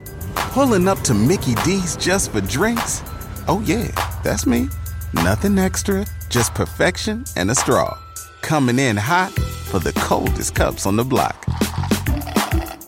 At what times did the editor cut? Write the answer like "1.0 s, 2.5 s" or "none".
none